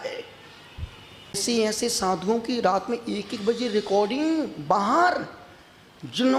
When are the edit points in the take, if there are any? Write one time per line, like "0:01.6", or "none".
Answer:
0:01.4